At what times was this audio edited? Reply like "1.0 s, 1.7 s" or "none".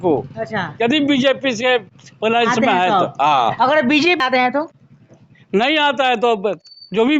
4.2 s

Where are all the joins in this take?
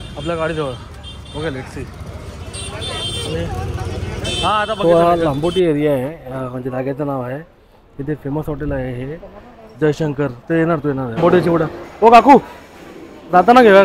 4.7 s, 11.2 s

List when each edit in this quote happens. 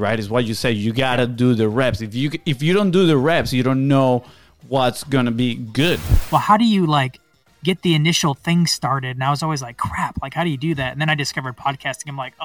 6.1 s

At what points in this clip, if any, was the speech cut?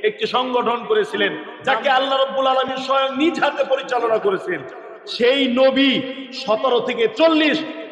1.5 s, 7.1 s

